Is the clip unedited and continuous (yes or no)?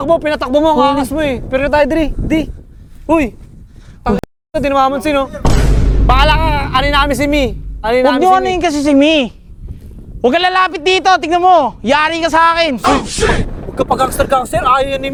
yes